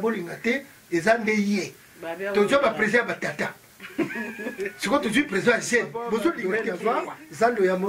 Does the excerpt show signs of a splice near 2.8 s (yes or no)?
no